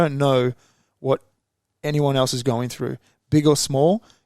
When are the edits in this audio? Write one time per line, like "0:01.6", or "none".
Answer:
none